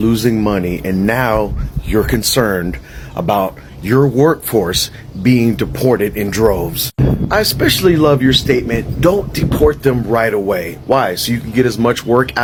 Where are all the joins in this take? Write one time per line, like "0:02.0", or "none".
none